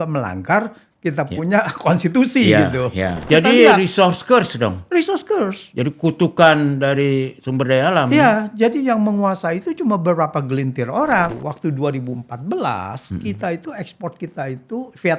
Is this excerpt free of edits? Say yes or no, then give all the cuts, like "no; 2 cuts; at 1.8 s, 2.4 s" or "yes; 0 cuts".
no; 2 cuts; at 3.3 s, 11.3 s